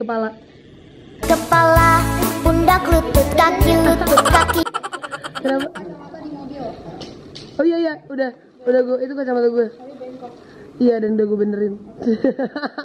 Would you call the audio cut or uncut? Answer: uncut